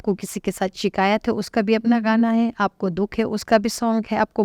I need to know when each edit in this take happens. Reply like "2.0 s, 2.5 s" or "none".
none

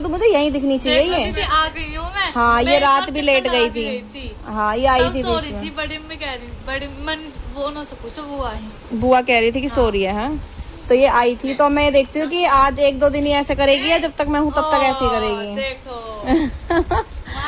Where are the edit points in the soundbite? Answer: none

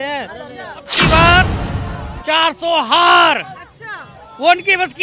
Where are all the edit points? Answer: 0.9 s

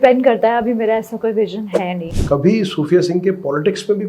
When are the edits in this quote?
2.1 s

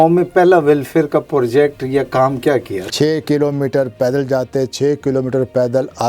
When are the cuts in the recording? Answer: 2.8 s

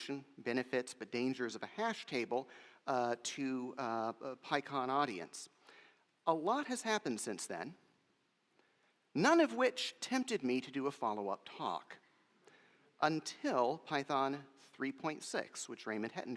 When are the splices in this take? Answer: 13.9 s

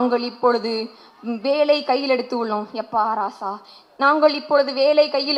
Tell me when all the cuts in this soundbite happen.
none

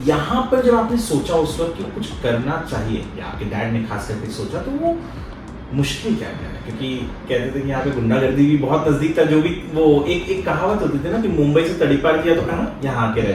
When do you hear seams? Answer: none

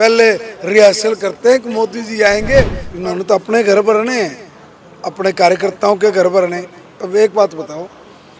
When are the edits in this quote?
2.8 s

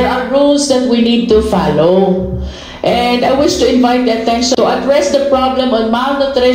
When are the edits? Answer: 4.6 s

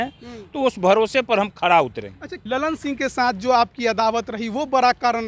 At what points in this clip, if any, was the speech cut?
2.3 s

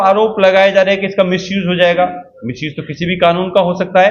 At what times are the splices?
none

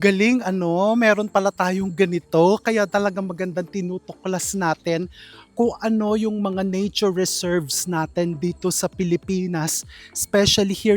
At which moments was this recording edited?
none

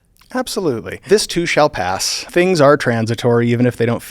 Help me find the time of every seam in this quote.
1.0 s, 2.3 s

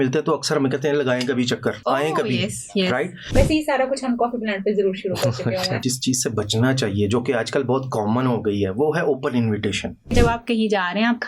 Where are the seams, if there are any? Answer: 1.8 s, 3.2 s, 5.8 s, 10.1 s

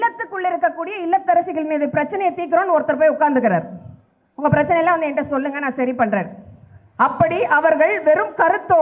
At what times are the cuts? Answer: none

